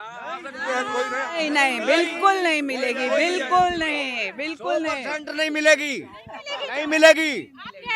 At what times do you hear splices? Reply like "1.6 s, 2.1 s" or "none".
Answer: none